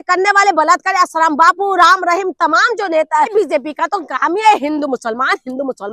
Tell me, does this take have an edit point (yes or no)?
yes